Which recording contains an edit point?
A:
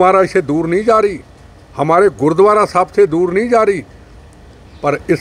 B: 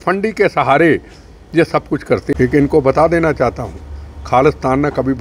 B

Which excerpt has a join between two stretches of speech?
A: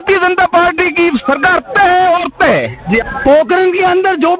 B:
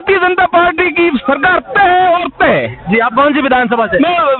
A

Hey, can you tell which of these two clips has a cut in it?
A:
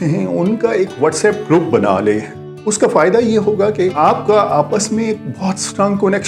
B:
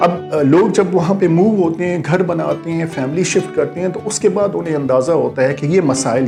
A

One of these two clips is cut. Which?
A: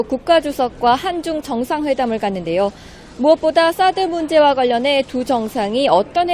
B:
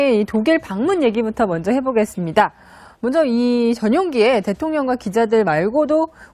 A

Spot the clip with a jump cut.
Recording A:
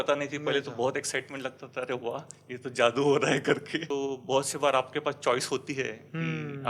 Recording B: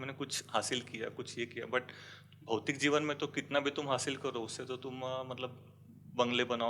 A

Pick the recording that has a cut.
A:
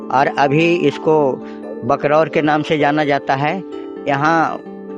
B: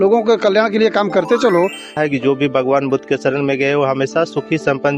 B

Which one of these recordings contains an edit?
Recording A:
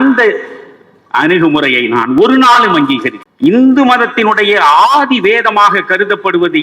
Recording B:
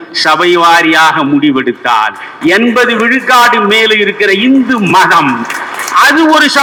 A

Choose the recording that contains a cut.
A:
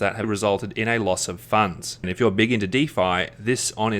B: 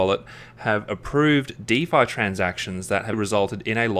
A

